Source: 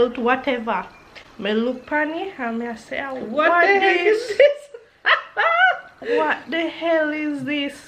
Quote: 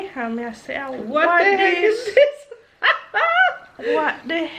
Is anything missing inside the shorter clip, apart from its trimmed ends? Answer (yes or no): no